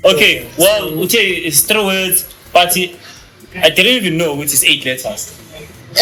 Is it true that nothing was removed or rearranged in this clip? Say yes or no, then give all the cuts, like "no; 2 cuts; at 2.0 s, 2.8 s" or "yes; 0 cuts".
yes; 0 cuts